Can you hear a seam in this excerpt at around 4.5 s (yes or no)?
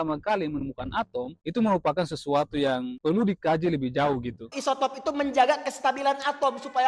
yes